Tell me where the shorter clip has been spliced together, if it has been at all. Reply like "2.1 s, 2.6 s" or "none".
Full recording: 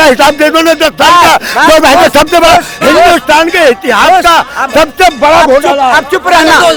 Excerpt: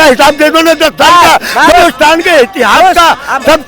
1.7 s